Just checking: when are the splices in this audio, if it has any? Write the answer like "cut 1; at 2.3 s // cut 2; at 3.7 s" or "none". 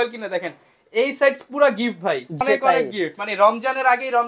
cut 1; at 2.4 s